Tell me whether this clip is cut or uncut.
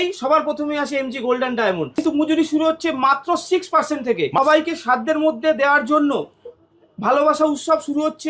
cut